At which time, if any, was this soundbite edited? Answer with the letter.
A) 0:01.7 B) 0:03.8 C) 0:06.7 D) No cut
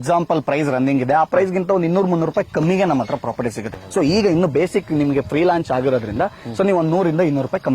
B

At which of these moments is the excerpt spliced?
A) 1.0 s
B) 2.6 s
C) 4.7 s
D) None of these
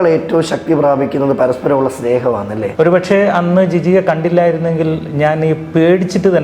B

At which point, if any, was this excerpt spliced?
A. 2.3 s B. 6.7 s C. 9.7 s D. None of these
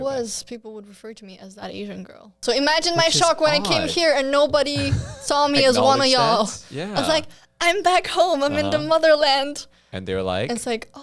A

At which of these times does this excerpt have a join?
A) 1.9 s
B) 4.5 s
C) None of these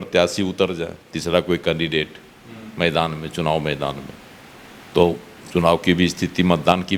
C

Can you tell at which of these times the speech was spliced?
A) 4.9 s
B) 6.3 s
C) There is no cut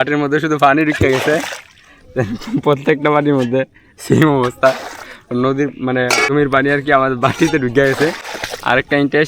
B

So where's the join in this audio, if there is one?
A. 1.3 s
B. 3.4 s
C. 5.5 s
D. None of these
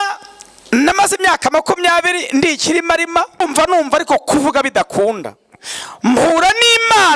B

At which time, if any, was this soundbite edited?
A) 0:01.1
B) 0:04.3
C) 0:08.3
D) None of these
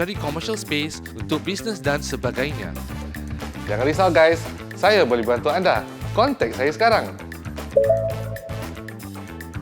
C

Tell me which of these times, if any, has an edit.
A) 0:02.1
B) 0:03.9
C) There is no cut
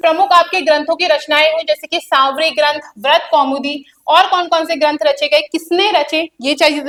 C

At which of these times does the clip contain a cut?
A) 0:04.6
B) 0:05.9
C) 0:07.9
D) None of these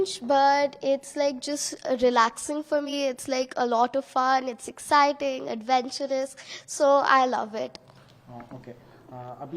D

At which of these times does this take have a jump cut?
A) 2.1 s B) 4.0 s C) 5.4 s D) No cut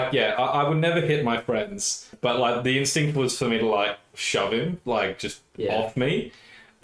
A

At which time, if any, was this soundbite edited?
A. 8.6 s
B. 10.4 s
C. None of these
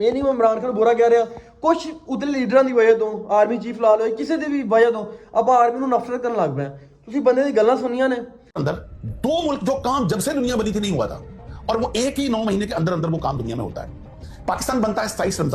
A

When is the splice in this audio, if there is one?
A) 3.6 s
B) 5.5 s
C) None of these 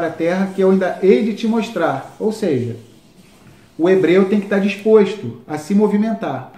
C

